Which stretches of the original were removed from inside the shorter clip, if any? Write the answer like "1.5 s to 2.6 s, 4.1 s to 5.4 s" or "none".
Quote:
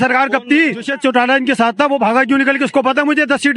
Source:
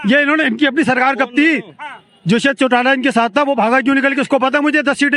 1.8 s to 2.5 s